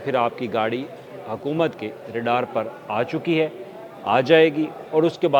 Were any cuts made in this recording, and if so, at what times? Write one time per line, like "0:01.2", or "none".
none